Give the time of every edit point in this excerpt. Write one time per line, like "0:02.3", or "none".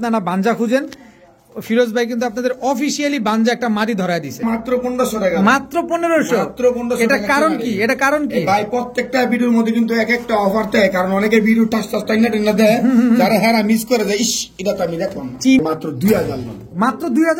0:04.4
0:15.6